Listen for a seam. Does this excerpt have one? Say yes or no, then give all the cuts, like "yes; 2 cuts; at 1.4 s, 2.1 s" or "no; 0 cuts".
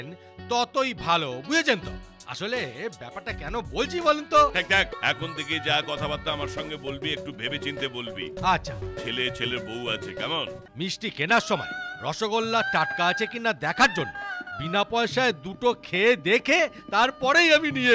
yes; 2 cuts; at 4.9 s, 10.6 s